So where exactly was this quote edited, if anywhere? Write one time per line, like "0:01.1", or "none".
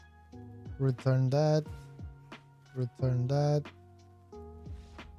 none